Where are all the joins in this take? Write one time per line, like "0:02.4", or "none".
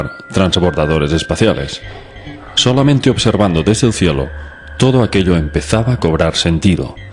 none